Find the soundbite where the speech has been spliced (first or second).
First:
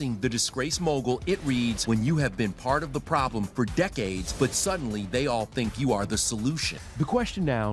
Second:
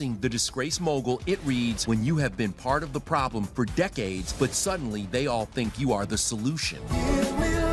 first